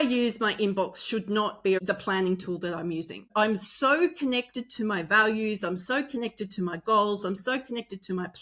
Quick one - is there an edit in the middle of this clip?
yes; 2 cuts; at 1.8 s, 3.3 s

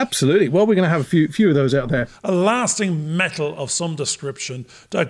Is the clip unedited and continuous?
no; 1 cut; at 2.1 s

